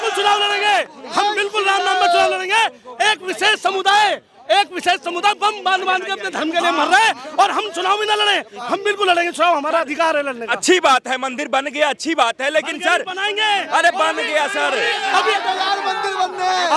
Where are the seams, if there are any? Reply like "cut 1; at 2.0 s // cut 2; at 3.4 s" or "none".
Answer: none